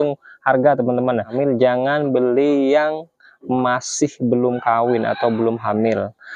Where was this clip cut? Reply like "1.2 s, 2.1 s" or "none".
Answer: 1.3 s